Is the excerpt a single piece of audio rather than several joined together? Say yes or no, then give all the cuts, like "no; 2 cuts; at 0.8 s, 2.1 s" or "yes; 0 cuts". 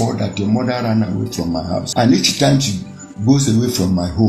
no; 1 cut; at 1.9 s